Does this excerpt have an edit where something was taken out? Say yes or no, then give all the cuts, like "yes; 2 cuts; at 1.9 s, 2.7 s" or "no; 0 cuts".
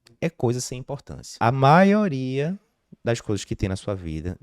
yes; 1 cut; at 1.3 s